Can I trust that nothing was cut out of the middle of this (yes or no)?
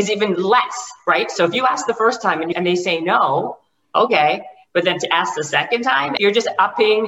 yes